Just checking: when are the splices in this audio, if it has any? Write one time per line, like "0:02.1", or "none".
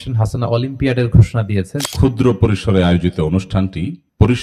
0:01.8